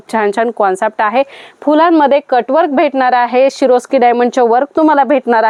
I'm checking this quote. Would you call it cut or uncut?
uncut